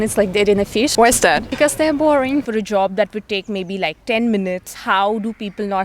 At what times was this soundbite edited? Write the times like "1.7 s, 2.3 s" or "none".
0.9 s, 2.4 s, 4.7 s